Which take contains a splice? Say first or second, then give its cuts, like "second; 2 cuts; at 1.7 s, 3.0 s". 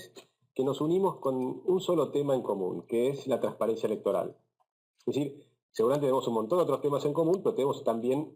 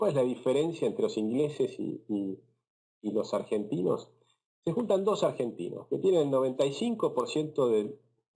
first; 1 cut; at 7.2 s